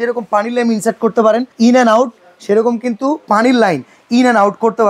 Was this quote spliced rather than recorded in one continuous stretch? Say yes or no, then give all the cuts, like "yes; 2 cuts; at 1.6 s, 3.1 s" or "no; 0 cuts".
yes; 1 cut; at 1.5 s